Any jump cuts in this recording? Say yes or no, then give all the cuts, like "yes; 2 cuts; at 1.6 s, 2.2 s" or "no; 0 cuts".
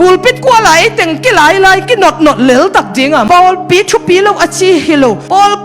yes; 1 cut; at 3.2 s